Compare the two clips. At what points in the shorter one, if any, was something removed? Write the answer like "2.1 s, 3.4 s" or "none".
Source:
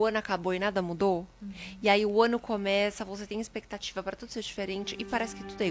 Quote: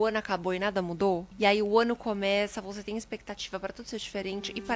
1.3 s